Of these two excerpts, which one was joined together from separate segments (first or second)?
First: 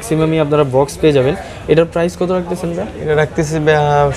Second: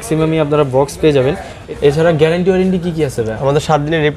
second